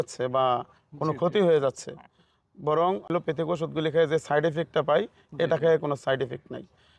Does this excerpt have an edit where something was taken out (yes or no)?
yes